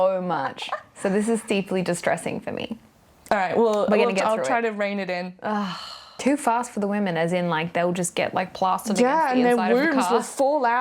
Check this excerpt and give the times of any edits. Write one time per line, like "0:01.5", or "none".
0:06.2